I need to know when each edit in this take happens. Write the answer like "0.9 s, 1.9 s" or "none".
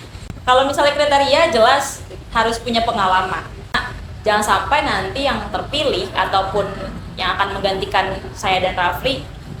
3.9 s